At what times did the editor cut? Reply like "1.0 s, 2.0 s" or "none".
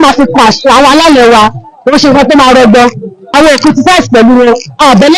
3.2 s

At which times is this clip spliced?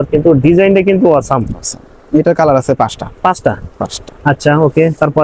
none

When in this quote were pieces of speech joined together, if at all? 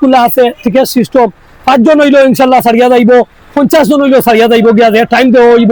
none

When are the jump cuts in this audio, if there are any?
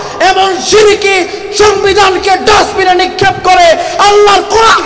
none

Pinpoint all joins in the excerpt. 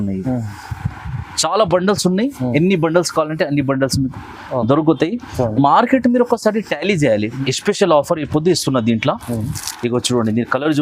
7.4 s

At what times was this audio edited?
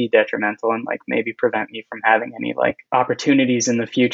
2.8 s

